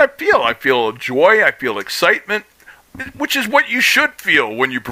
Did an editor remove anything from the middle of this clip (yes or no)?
no